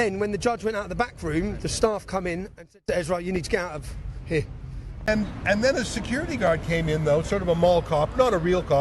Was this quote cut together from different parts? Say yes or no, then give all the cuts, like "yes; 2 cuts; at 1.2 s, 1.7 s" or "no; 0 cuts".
yes; 1 cut; at 5.1 s